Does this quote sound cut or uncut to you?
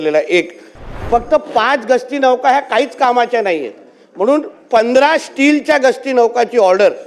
cut